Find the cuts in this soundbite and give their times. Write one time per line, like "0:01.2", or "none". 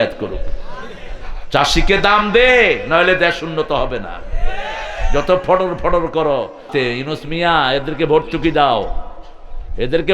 0:06.7